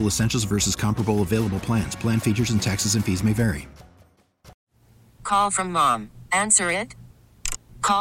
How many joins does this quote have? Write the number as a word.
one